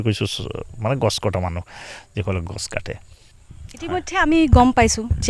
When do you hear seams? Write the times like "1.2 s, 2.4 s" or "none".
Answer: none